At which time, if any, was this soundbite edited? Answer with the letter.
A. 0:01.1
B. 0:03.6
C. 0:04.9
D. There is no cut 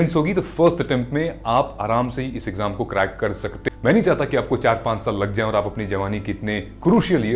B